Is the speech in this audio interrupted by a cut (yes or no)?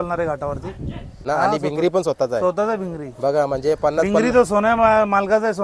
yes